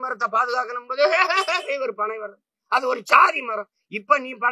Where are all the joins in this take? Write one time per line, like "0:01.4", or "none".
none

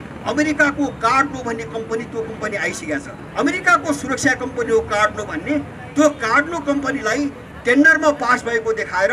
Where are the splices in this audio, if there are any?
0:03.2

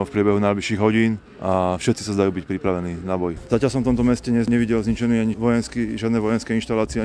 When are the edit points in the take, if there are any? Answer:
0:01.3
0:03.4

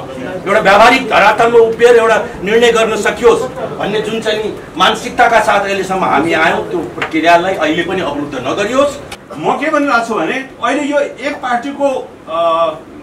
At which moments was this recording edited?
0:09.1

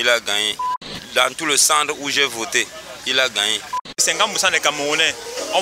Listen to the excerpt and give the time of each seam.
0:00.9
0:04.0

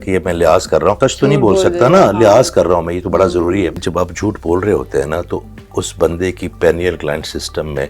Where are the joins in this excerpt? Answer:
0:01.0
0:03.8

